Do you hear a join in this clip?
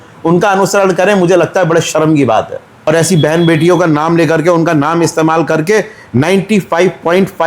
yes; 1 cut; at 2.9 s

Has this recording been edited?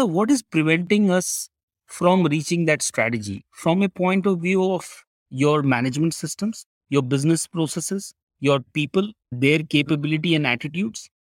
no; 0 cuts

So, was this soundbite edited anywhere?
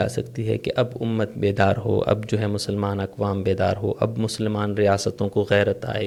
no; 0 cuts

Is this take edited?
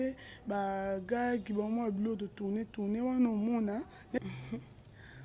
yes; 1 cut; at 4.2 s

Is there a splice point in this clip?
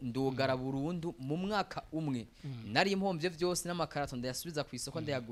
no; 0 cuts

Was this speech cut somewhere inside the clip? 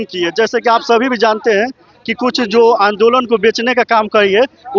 no; 0 cuts

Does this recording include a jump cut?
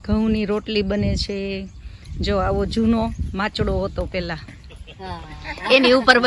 no; 0 cuts

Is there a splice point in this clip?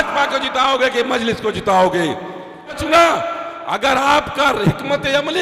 yes; 1 cut; at 2.8 s

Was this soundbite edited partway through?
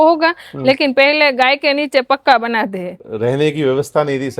yes; 1 cut; at 3.0 s

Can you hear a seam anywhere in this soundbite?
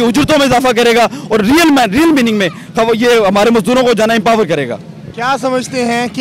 no; 0 cuts

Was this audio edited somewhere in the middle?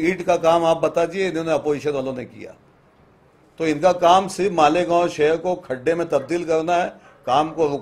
no; 0 cuts

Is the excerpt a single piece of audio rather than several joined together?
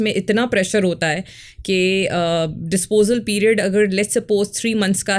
yes; 0 cuts

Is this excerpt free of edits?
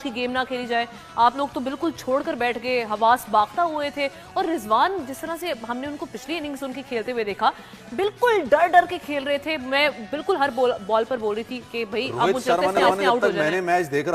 yes; 0 cuts

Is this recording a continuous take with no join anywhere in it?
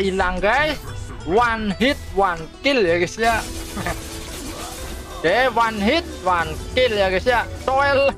no; 1 cut; at 3.9 s

